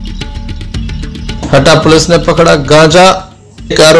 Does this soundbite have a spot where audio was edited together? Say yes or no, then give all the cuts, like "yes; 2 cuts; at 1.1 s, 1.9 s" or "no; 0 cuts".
yes; 1 cut; at 1.2 s